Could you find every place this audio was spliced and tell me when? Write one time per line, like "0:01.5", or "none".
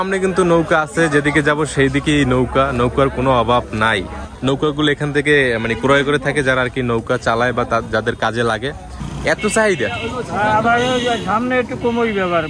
0:04.3
0:08.9